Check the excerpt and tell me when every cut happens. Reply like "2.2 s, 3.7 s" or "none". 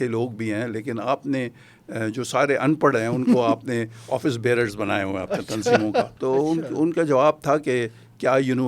6.1 s